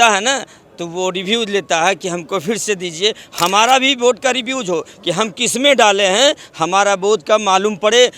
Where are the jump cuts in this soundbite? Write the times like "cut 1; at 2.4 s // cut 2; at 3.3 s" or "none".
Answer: none